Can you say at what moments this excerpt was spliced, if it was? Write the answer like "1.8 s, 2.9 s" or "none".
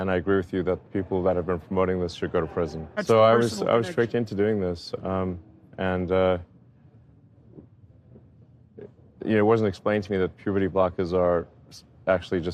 3.0 s